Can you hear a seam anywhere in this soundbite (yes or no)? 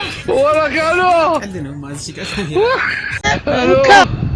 yes